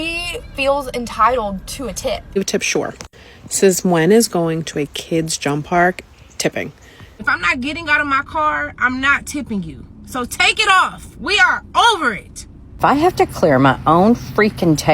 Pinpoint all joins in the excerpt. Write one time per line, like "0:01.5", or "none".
0:02.4
0:07.1
0:12.8